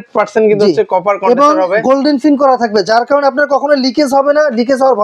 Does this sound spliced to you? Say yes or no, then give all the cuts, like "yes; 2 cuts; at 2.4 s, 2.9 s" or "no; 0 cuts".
no; 0 cuts